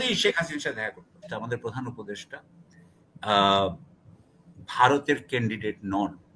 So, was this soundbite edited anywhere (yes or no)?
yes